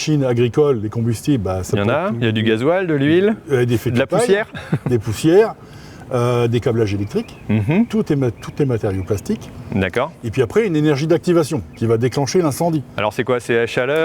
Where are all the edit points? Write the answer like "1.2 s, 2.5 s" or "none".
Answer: none